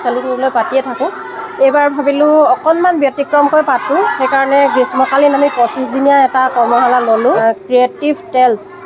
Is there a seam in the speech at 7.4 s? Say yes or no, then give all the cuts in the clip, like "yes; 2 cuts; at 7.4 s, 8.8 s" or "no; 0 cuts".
yes; 1 cut; at 7.4 s